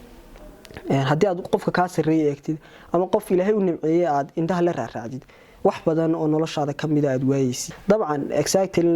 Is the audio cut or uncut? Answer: cut